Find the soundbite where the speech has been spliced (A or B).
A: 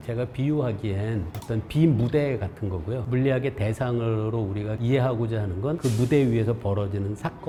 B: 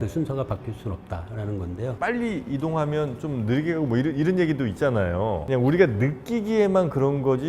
B